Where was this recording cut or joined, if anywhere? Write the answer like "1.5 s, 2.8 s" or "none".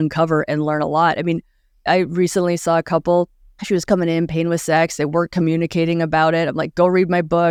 none